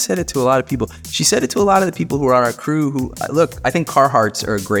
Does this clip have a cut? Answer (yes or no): no